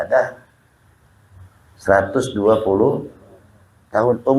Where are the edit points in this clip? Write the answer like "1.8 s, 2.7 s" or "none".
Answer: none